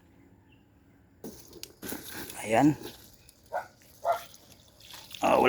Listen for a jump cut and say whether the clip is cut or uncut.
cut